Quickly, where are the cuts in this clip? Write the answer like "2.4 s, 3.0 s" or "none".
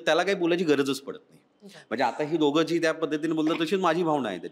none